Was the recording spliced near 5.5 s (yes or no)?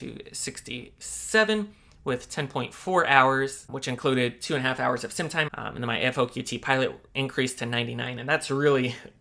yes